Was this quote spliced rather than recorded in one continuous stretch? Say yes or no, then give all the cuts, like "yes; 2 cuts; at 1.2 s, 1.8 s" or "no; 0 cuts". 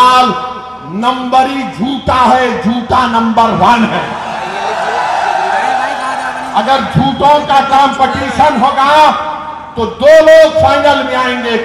no; 0 cuts